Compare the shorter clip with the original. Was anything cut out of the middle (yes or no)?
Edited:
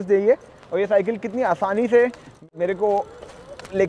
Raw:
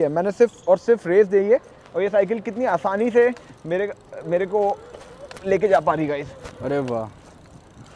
yes